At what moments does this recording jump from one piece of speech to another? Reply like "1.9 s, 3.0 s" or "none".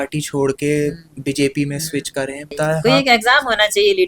2.5 s